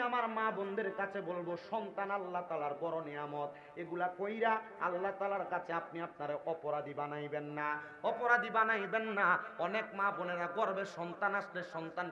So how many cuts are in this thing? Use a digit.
0